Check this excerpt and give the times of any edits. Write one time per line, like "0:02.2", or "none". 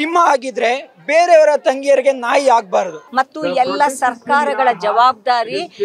0:03.0